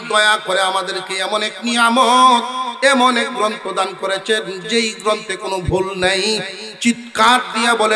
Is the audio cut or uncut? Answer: uncut